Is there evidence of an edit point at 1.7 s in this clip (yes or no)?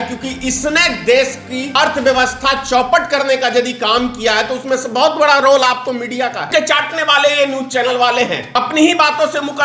yes